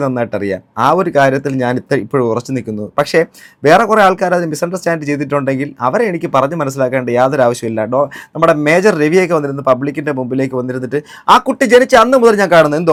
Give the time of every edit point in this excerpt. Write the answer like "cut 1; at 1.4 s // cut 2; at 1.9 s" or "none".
none